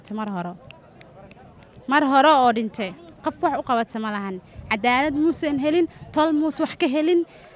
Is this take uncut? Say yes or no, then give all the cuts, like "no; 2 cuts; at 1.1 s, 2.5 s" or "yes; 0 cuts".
yes; 0 cuts